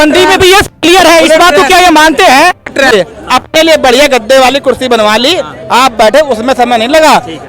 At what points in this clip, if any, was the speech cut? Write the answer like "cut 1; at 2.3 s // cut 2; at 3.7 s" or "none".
cut 1; at 2.9 s